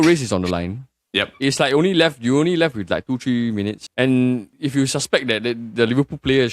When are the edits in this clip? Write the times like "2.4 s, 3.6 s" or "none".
3.8 s, 4.5 s